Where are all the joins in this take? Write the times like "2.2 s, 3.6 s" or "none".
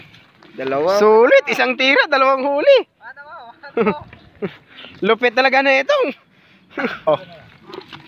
7.1 s